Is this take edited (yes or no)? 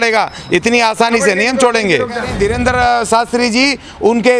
yes